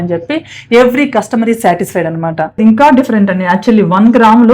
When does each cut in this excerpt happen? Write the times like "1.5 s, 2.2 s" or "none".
2.6 s